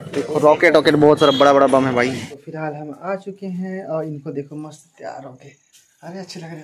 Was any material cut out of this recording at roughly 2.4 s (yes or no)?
yes